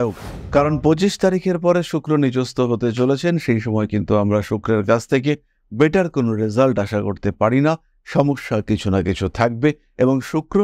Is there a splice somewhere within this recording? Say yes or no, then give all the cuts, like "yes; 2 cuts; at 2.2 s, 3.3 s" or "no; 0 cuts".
no; 0 cuts